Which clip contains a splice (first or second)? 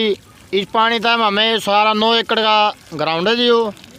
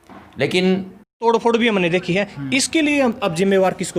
second